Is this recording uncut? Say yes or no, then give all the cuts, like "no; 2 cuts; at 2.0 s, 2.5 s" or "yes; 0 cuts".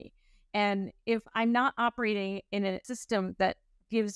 no; 1 cut; at 2.8 s